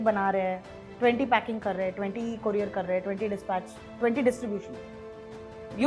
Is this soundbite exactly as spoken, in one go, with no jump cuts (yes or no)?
yes